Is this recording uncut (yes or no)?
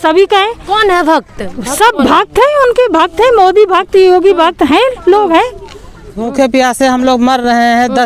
no